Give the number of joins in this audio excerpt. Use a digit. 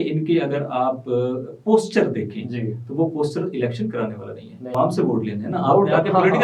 1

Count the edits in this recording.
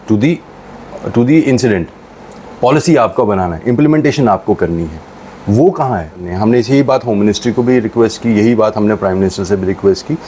1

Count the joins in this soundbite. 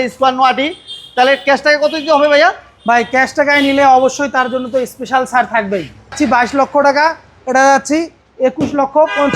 1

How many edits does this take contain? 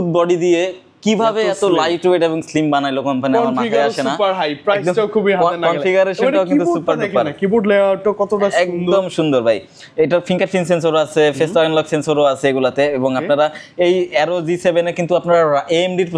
0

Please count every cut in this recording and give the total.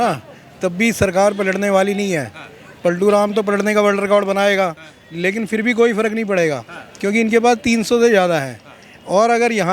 0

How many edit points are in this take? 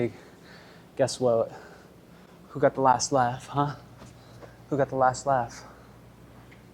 0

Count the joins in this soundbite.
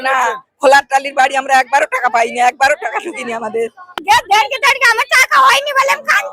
1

